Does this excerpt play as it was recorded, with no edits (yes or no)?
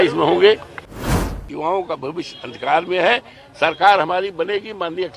no